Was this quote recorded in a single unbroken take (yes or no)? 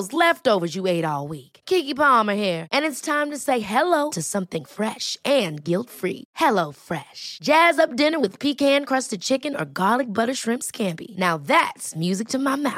yes